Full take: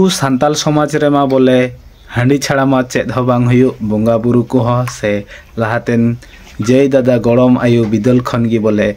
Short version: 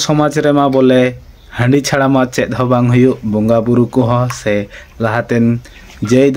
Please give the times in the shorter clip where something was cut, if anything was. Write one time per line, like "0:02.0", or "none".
none